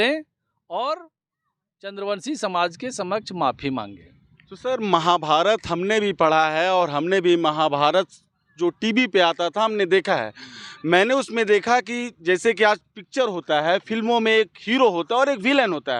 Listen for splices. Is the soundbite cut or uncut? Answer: uncut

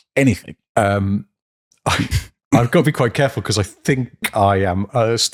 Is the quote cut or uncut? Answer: uncut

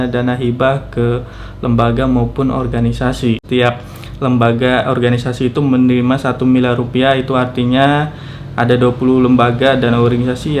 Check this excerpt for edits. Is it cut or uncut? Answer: cut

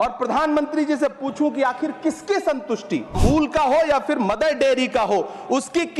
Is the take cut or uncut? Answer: cut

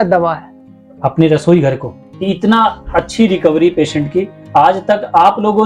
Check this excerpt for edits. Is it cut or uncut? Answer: cut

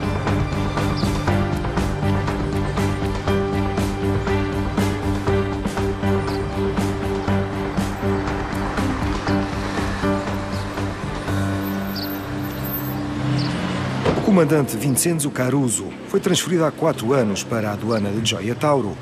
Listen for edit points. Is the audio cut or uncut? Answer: uncut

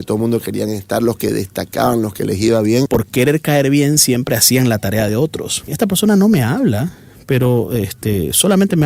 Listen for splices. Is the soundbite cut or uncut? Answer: cut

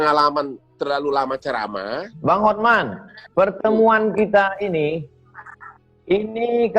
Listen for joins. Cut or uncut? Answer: cut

